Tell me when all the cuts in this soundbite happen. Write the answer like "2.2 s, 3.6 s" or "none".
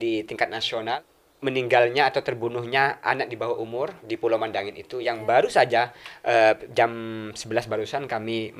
0.9 s, 4.0 s